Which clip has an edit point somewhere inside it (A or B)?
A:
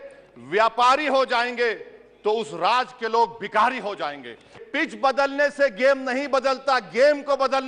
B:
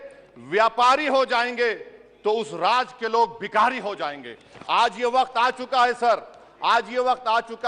A